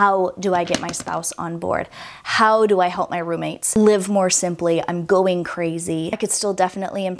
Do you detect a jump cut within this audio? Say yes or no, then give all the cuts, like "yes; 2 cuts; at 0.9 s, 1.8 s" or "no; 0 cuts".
no; 0 cuts